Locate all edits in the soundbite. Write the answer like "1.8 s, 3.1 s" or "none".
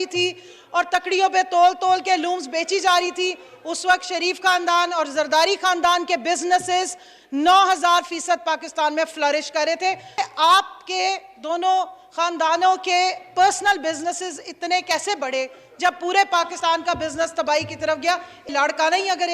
10.1 s, 18.5 s

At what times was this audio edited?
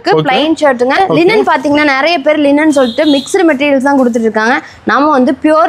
1.0 s

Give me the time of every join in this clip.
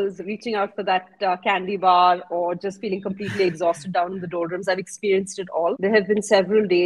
5.8 s

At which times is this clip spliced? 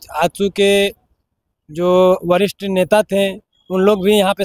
none

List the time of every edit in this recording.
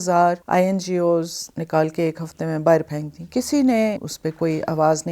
4.0 s

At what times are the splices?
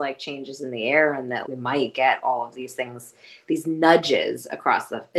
1.4 s

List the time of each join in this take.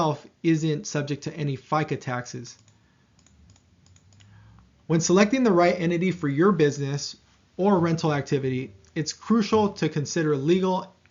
4.8 s

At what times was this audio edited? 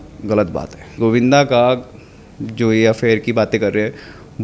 1.0 s

